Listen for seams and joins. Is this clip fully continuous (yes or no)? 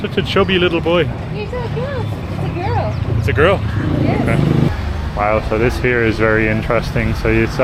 yes